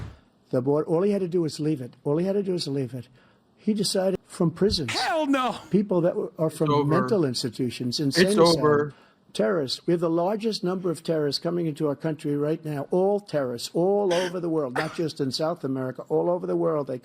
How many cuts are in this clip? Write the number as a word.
one